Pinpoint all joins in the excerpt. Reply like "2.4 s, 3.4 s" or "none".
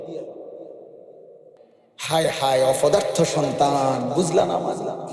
1.6 s